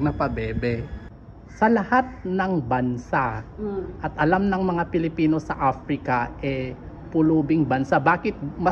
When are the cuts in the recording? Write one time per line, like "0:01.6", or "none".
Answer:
0:01.0